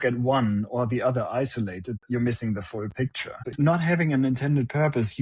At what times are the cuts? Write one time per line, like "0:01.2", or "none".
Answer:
0:02.0
0:03.5